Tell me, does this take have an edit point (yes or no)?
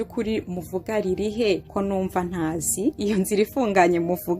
yes